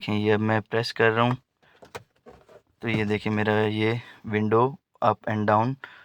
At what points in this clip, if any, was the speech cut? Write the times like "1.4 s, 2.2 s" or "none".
none